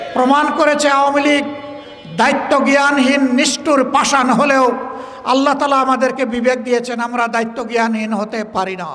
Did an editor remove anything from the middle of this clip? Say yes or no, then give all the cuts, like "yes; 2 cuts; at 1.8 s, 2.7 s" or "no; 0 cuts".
no; 0 cuts